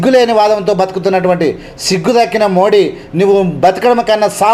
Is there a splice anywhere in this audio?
no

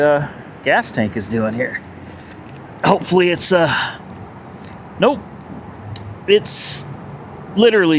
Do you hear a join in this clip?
no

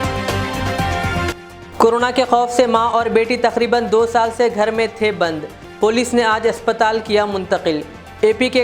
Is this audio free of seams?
no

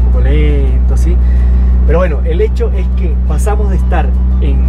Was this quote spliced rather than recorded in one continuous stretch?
no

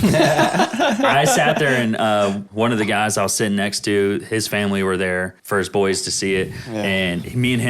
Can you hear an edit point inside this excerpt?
yes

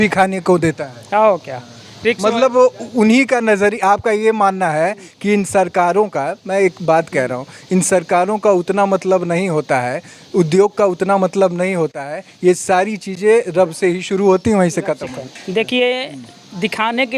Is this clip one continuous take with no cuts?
yes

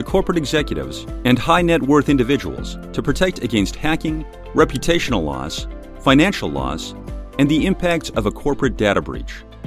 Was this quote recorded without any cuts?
yes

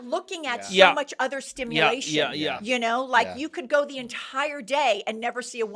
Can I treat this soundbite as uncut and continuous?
yes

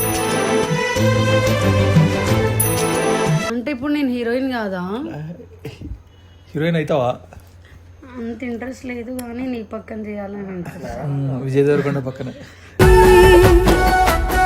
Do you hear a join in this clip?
yes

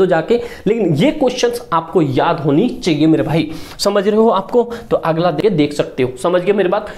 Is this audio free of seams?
no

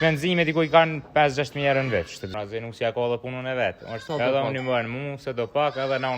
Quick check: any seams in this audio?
yes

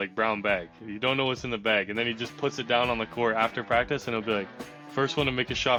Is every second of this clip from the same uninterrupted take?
yes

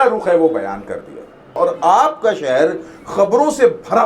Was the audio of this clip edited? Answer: yes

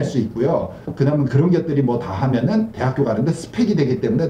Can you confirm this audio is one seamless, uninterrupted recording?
yes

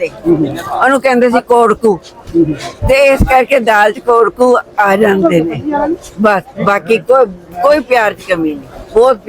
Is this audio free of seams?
yes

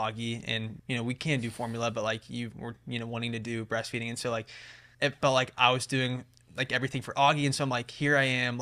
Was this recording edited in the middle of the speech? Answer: no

